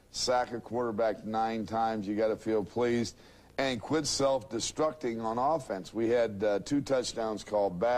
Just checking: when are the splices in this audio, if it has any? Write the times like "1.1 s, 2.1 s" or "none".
2.9 s

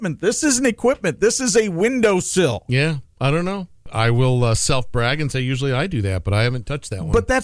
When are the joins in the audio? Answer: 3.9 s

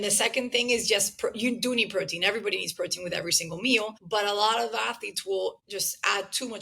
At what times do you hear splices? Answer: 4.0 s, 5.6 s

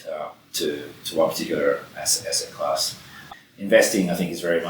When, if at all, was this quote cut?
3.3 s

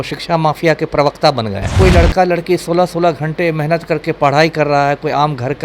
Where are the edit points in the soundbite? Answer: 1.7 s

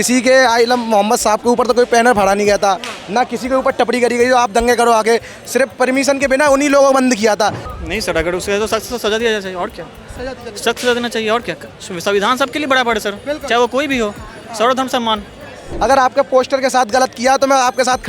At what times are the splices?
7.6 s, 15.7 s

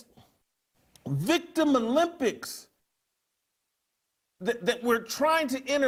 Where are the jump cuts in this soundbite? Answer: none

